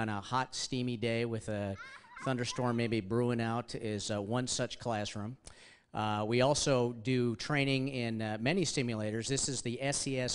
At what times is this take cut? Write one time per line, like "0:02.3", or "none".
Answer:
0:02.4